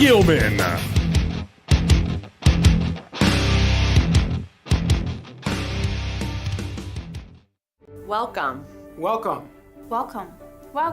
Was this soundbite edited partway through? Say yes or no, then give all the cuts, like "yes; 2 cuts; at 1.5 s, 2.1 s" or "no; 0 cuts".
yes; 1 cut; at 7.7 s